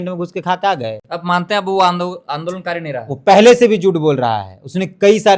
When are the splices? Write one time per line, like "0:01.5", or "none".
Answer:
none